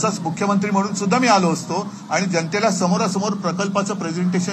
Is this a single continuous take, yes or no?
yes